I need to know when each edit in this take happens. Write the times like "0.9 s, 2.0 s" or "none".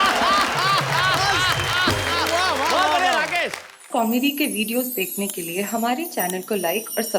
3.8 s